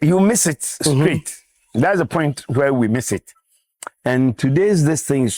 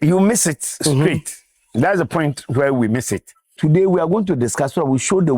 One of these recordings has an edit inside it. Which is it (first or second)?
second